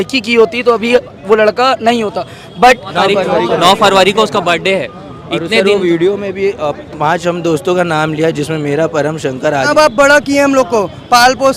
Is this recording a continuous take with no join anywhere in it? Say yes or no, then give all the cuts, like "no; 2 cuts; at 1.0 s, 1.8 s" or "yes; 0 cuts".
no; 2 cuts; at 2.9 s, 9.7 s